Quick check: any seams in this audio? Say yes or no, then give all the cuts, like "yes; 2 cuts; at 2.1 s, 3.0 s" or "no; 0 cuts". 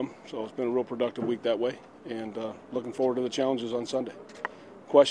no; 0 cuts